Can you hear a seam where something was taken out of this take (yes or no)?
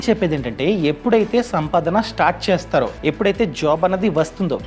yes